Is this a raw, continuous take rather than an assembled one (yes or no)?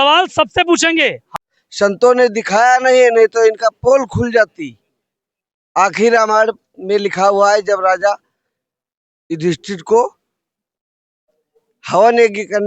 no